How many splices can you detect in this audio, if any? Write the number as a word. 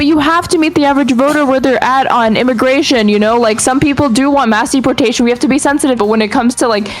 one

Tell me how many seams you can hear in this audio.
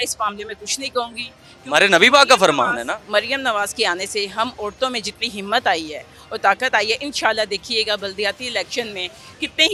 zero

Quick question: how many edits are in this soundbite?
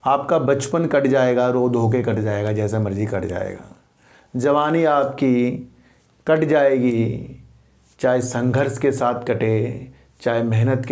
zero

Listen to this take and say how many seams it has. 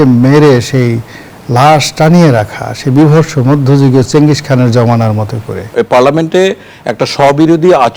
one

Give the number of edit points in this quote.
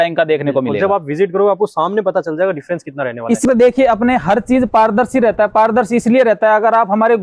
one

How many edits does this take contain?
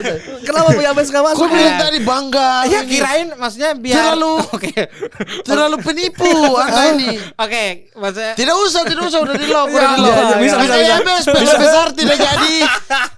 zero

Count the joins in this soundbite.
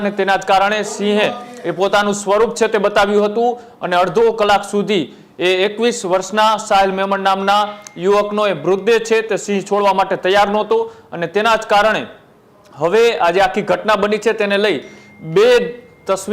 zero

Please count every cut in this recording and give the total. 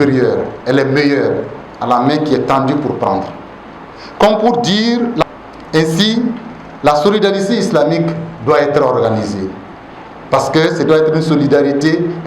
one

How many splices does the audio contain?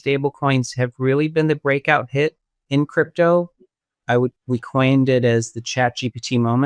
one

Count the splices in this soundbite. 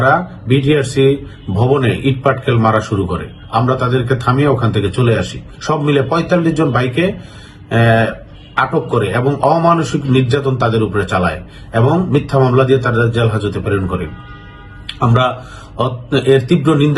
zero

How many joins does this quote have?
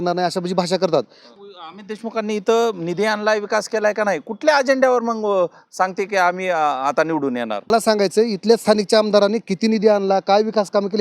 two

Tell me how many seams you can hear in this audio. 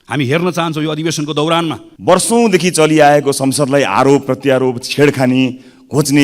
one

